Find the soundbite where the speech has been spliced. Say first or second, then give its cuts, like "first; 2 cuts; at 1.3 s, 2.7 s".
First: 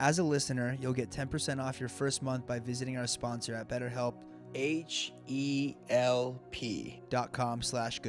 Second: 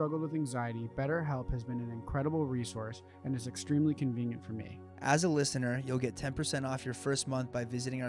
first; 2 cuts; at 4.5 s, 6.9 s